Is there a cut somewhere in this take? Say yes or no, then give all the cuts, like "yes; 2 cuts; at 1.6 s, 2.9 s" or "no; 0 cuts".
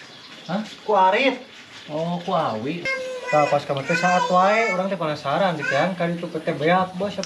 yes; 1 cut; at 2.8 s